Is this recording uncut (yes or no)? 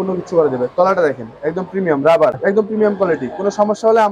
no